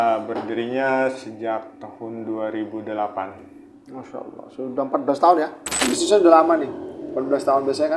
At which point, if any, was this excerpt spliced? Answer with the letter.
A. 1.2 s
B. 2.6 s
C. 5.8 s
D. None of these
C